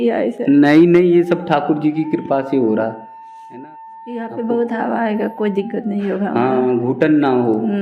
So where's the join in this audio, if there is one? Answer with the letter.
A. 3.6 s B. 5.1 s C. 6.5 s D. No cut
A